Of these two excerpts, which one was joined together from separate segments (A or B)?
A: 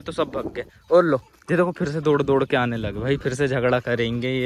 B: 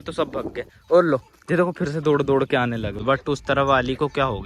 B